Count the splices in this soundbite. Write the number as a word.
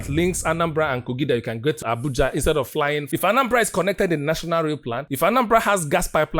two